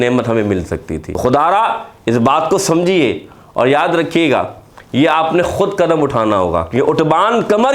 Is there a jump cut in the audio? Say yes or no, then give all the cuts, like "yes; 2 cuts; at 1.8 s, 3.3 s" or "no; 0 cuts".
yes; 1 cut; at 1.1 s